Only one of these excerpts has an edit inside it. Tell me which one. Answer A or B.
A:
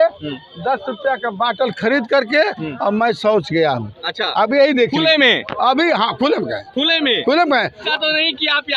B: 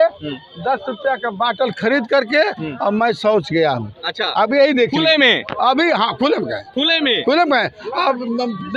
A